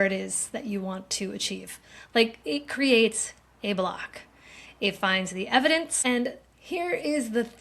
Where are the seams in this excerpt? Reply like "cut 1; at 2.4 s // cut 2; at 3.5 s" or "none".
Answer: cut 1; at 5.9 s